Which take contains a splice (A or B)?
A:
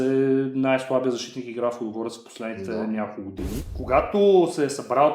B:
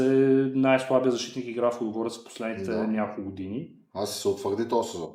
A